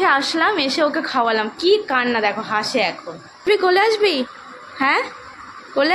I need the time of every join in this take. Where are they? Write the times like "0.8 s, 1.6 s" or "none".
3.4 s